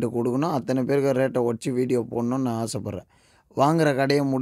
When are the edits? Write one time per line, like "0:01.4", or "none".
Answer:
none